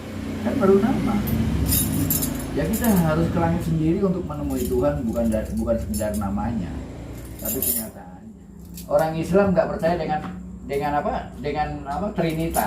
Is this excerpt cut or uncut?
cut